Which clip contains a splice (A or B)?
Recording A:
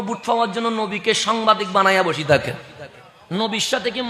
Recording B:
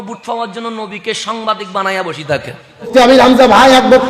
B